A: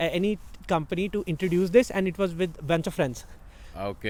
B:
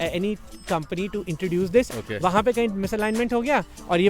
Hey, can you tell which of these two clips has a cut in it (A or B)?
B